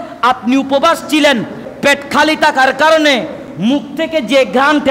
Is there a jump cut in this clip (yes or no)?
yes